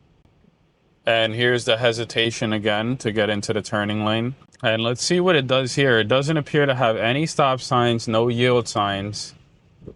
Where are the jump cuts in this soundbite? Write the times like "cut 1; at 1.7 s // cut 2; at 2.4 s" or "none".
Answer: cut 1; at 4.5 s